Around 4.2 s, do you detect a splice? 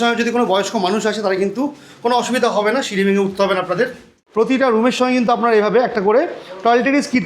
yes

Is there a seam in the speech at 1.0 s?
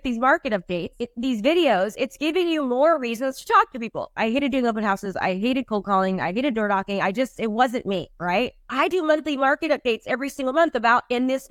yes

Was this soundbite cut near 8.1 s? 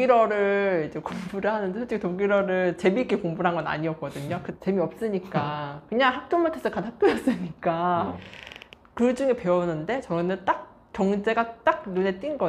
yes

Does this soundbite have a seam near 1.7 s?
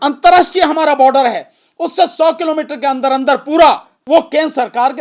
no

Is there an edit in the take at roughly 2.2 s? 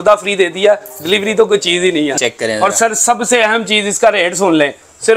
yes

